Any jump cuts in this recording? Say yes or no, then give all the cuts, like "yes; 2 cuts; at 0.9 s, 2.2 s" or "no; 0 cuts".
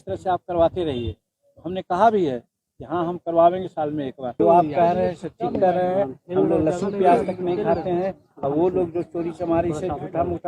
yes; 1 cut; at 4.3 s